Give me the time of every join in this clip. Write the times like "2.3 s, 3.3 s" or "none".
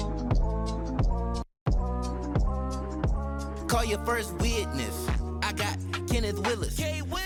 none